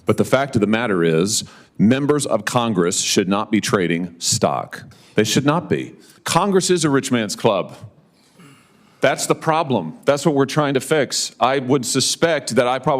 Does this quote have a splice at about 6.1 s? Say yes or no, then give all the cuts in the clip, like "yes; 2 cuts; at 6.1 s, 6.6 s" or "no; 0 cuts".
yes; 1 cut; at 6.1 s